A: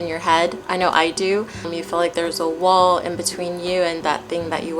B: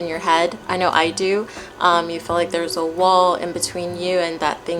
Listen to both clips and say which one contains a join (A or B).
A